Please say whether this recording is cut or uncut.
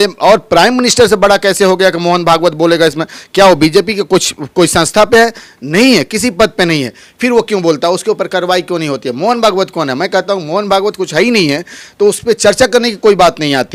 uncut